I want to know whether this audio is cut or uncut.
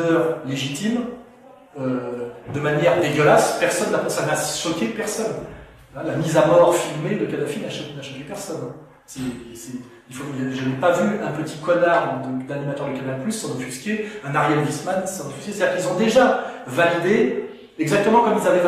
uncut